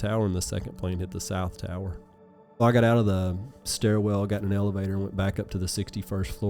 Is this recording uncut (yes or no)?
no